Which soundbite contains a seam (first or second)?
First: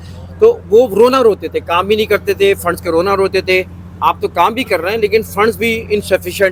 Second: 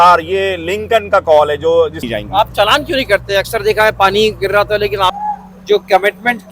second